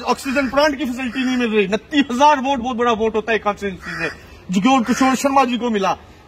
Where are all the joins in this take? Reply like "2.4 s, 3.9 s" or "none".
none